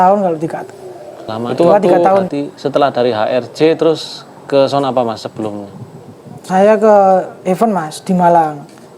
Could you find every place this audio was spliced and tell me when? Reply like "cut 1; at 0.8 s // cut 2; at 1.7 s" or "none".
cut 1; at 2.3 s